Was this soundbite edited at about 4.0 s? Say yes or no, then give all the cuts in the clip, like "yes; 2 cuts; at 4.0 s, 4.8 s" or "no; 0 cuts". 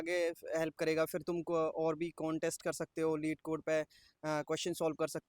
no; 0 cuts